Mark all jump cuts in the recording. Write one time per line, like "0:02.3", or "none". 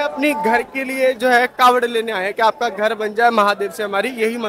none